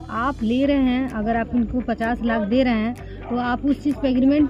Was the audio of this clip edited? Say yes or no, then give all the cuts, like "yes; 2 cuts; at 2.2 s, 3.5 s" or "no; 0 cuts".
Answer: no; 0 cuts